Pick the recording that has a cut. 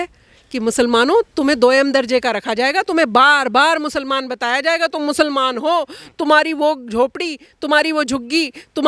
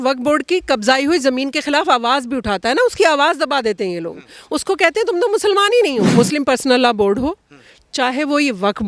second; 1 cut; at 6.1 s

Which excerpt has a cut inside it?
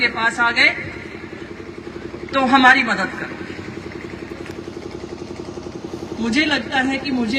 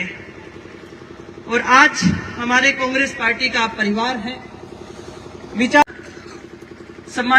second; 1 cut; at 5.8 s

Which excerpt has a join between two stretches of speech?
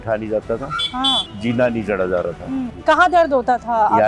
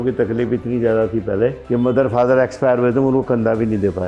first; 2 cuts; at 1.3 s, 2.7 s

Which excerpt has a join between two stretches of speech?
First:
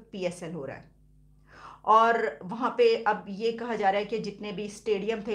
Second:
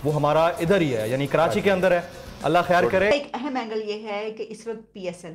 second; 1 cut; at 3.1 s

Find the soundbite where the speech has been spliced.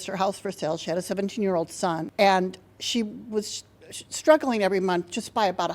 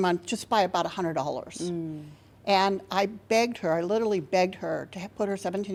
first; 1 cut; at 2.1 s

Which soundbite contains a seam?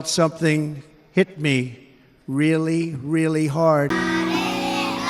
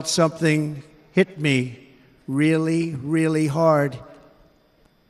second; 1 cut; at 3.9 s

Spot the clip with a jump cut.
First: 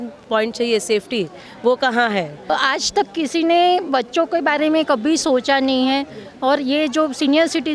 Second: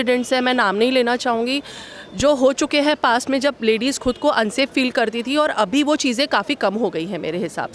first; 1 cut; at 2.5 s

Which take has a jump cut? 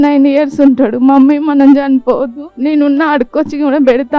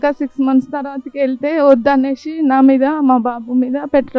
first; 1 cut; at 2.4 s

